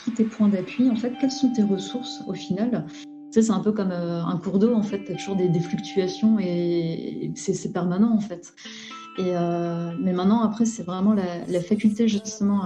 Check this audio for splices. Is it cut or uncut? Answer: cut